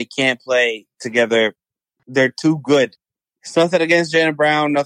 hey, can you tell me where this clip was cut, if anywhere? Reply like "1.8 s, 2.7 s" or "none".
1.9 s